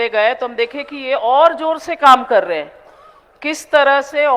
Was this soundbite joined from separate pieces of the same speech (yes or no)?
no